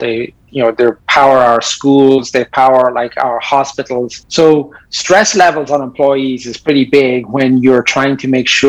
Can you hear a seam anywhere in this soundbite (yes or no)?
yes